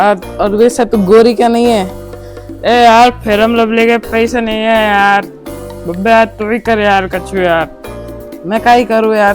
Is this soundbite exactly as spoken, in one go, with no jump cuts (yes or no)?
yes